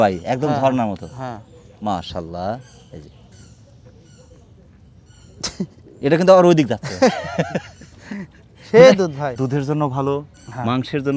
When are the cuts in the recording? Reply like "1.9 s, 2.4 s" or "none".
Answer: none

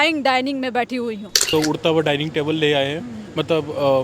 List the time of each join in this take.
1.4 s

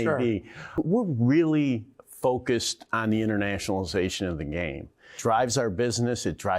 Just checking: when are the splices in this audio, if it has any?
0.8 s, 5.2 s

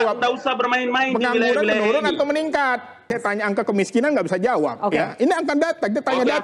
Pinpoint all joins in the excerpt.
3.1 s

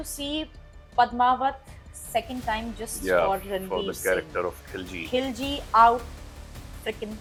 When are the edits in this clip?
none

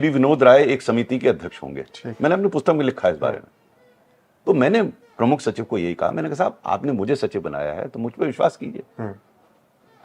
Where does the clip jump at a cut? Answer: none

